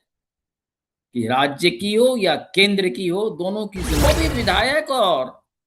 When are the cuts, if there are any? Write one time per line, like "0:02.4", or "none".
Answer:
0:04.0